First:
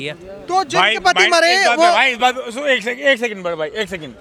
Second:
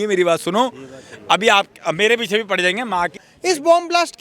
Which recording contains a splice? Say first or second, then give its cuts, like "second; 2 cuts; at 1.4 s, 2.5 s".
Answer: second; 1 cut; at 3.2 s